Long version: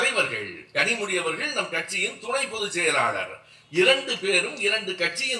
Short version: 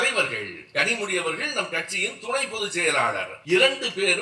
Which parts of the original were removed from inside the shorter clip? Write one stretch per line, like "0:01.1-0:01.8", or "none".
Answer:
0:03.3-0:03.6

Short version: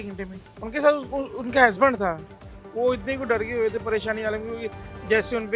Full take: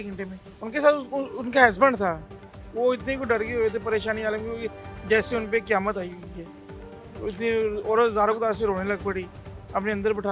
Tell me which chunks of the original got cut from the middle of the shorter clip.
none

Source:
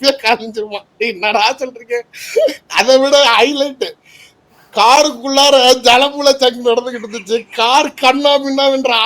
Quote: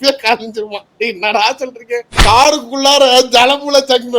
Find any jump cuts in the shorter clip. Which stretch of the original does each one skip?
0:02.1-0:04.6

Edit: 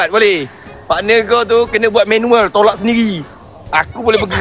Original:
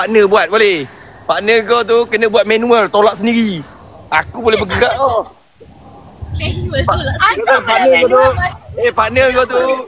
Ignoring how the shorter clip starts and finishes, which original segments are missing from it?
none

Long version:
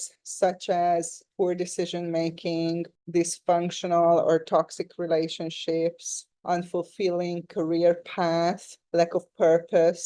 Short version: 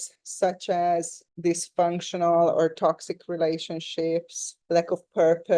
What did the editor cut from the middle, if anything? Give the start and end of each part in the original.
0:01.2-0:02.9
0:06.2-0:08.7

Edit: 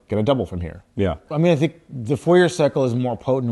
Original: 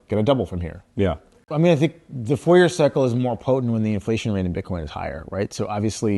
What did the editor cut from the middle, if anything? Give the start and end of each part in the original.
0:01.2-0:01.4

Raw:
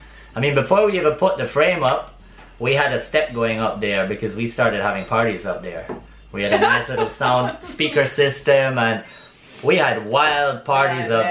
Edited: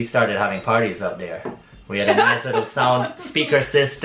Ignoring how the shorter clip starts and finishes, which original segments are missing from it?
none

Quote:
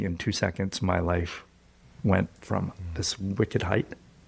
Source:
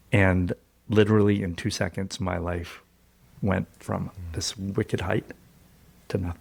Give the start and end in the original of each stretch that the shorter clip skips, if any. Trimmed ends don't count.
none

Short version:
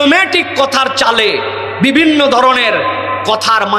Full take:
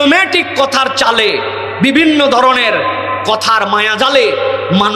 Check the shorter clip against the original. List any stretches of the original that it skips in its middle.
none

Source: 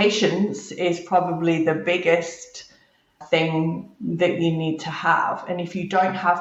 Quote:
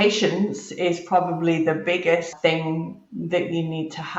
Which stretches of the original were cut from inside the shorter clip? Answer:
0:02.3-0:03.2

